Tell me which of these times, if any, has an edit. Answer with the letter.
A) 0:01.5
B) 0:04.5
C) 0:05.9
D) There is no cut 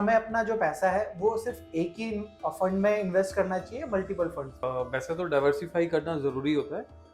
B